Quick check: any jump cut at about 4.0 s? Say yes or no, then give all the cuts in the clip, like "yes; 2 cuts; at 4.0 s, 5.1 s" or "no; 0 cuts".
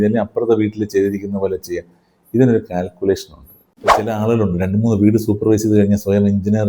yes; 1 cut; at 4.0 s